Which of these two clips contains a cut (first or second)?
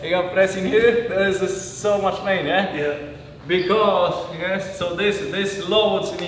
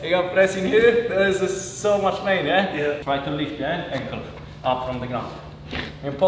second